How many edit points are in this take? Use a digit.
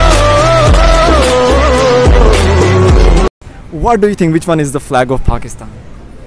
1